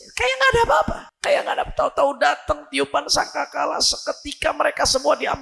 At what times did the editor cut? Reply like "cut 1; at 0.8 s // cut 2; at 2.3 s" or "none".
cut 1; at 1.1 s